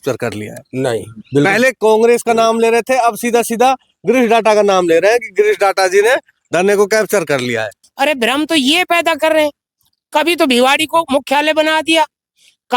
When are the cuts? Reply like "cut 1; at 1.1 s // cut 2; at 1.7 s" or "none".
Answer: cut 1; at 7.8 s

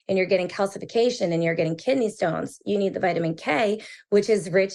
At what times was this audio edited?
none

